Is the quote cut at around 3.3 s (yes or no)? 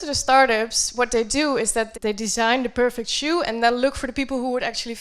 no